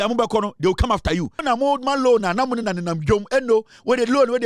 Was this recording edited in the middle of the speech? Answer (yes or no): yes